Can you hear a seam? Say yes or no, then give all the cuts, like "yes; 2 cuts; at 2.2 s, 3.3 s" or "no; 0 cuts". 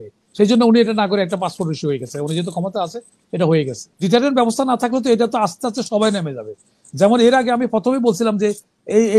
yes; 1 cut; at 4.0 s